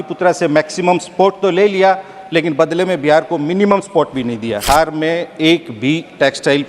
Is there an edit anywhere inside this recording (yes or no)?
yes